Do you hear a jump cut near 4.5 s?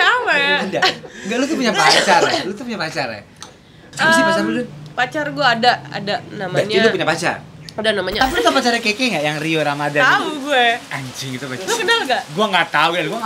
yes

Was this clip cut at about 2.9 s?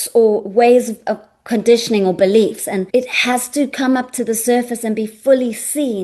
yes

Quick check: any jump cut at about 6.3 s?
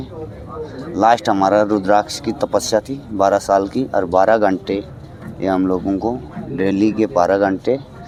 no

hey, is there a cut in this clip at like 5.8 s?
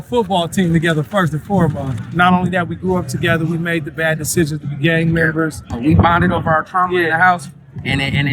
yes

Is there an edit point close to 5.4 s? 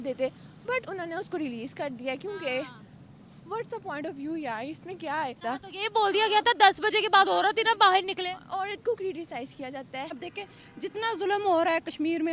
yes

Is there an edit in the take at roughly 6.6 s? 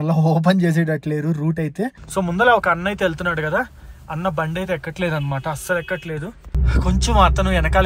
yes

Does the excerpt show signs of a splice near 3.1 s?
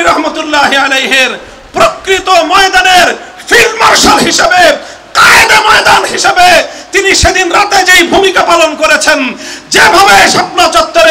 no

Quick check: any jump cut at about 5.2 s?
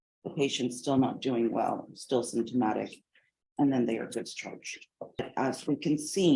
yes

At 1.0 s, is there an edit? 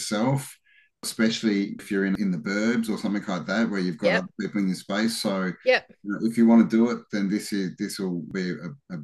yes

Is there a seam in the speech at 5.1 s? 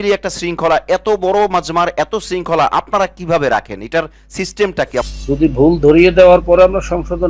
yes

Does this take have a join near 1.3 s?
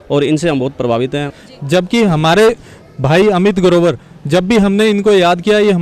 yes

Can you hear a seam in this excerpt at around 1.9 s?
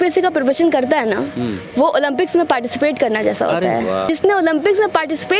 no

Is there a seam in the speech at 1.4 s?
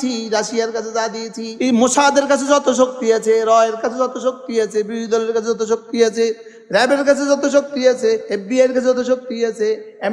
yes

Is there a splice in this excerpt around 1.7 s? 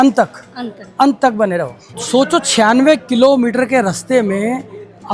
no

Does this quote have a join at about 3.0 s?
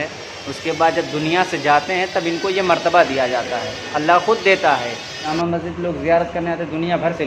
no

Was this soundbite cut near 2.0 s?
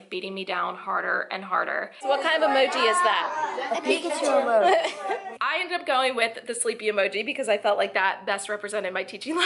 yes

